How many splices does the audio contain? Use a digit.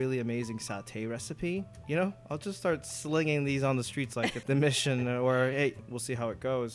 2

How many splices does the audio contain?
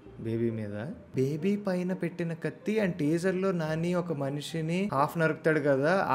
2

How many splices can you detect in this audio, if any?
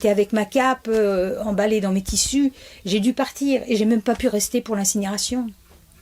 0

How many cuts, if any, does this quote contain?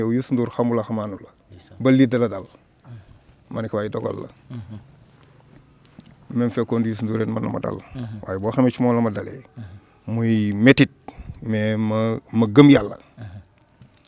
0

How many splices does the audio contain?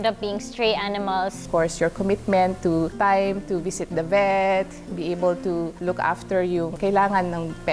3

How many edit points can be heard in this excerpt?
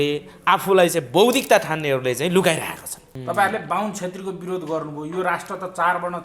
1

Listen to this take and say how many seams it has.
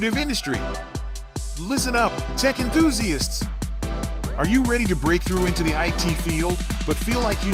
0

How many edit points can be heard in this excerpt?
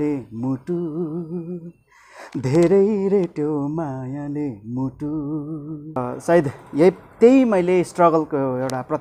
1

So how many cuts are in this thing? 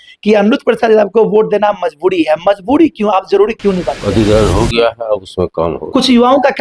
1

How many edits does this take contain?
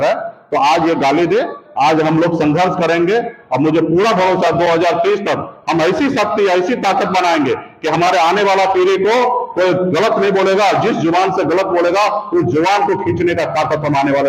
0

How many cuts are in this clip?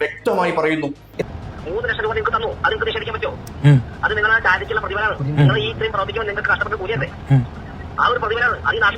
1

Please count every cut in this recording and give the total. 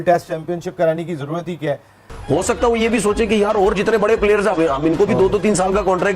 1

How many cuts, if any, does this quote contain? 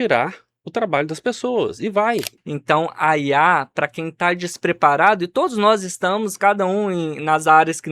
1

